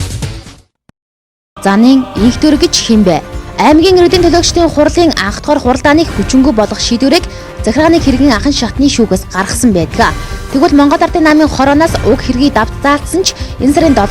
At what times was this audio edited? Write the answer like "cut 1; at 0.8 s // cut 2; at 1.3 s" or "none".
cut 1; at 1.5 s